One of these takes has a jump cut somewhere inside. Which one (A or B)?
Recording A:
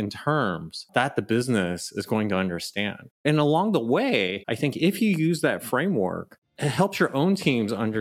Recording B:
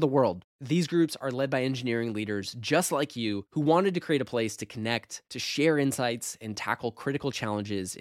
A